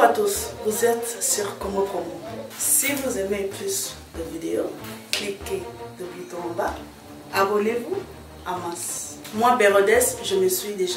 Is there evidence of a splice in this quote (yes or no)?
no